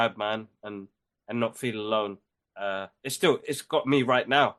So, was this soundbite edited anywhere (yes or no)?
no